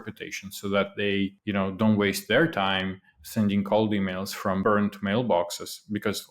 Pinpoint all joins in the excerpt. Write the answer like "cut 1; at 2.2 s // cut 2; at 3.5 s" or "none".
cut 1; at 1.4 s // cut 2; at 4.6 s